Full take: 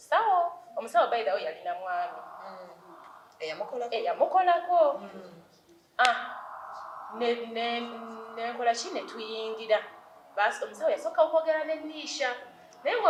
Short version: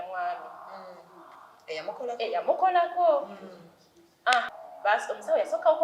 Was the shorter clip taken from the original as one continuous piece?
no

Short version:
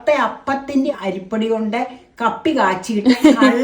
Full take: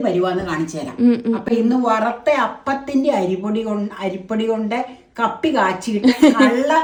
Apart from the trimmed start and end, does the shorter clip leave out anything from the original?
yes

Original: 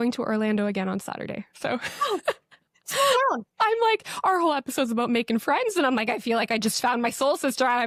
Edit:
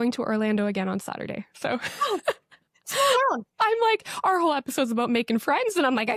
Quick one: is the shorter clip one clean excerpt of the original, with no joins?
yes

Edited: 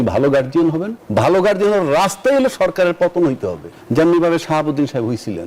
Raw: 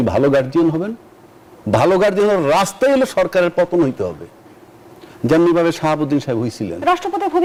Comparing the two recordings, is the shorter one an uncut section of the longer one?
no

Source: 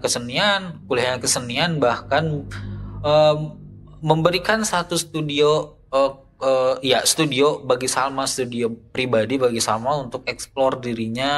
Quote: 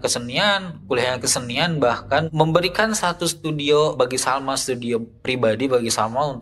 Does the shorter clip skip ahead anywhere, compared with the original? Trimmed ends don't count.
yes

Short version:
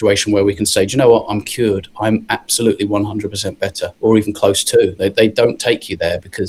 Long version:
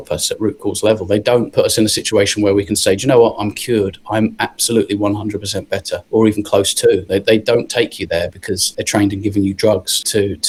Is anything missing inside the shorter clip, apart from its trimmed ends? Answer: no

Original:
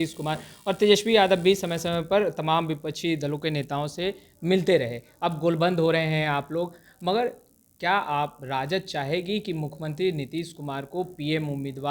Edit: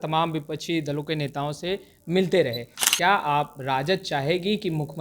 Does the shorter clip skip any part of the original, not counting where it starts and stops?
yes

